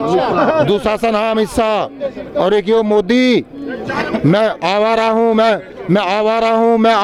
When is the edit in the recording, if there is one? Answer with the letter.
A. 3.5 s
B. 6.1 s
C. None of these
C